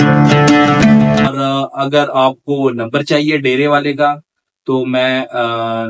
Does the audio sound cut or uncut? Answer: cut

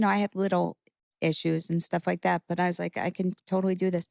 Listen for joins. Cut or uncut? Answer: uncut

